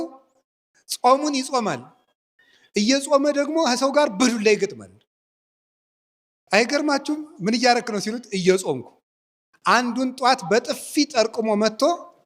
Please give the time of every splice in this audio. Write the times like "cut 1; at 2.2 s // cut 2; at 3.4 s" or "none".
none